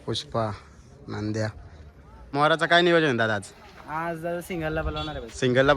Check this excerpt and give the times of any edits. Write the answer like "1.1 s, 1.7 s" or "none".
2.3 s